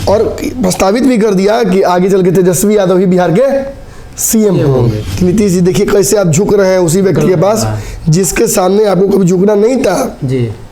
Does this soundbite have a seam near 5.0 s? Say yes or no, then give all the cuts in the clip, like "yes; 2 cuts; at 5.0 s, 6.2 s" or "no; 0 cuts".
yes; 1 cut; at 5.0 s